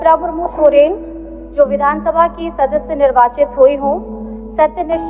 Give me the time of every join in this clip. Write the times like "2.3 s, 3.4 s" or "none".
none